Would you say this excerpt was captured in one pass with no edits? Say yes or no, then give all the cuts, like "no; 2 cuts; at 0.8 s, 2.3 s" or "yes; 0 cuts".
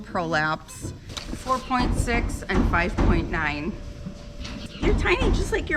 no; 2 cuts; at 1.2 s, 4.7 s